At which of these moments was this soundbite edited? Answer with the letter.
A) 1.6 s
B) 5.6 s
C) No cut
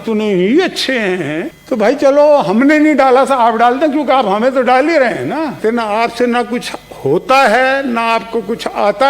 B